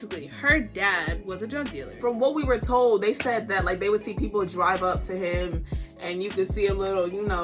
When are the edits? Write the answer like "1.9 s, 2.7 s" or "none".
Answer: 1.8 s